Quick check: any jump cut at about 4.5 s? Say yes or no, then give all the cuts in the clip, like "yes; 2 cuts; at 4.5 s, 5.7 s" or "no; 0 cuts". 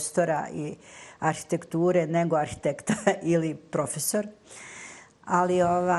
no; 0 cuts